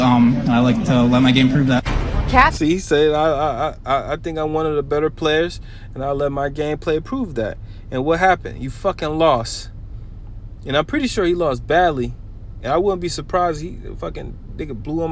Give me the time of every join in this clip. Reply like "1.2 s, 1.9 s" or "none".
none